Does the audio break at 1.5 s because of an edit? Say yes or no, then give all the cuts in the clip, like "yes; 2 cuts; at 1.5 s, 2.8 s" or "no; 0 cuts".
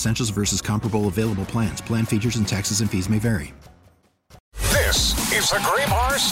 no; 1 cut; at 4.4 s